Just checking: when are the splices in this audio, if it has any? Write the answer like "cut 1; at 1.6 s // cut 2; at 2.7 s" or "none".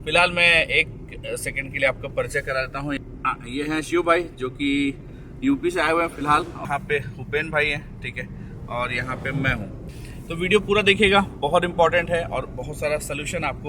cut 1; at 3.0 s // cut 2; at 6.6 s // cut 3; at 9.9 s